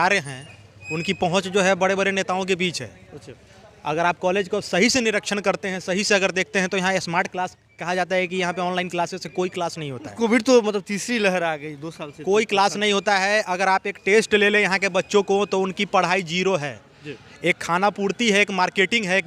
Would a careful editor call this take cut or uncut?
uncut